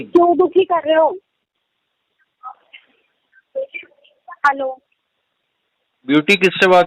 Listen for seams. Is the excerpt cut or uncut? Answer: uncut